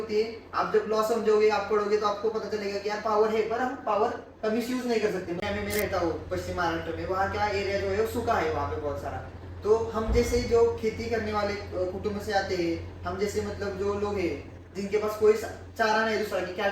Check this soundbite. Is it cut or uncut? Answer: cut